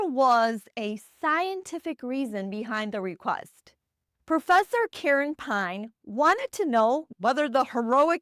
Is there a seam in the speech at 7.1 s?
yes; 1 cut; at 7.1 s

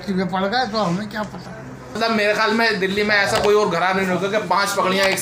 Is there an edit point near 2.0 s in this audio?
yes; 1 cut; at 2.0 s

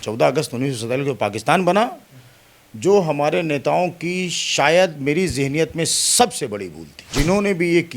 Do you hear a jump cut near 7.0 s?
yes; 1 cut; at 7.0 s

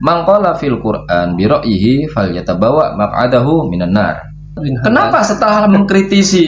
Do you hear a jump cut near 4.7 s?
yes; 1 cut; at 4.7 s

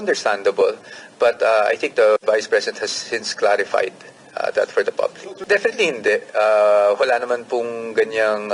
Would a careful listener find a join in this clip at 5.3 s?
yes; 1 cut; at 5.3 s

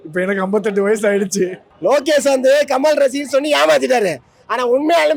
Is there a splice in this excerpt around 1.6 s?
yes; 1 cut; at 1.6 s

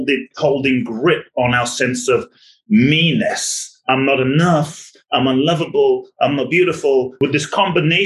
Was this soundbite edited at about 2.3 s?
no; 1 cut; at 7.1 s

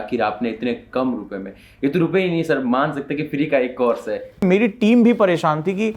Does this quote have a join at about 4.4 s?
yes; 1 cut; at 4.4 s

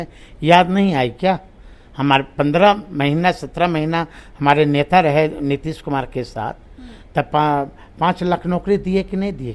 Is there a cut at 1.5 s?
no; 0 cuts

